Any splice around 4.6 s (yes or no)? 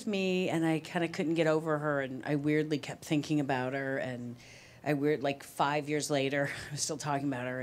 no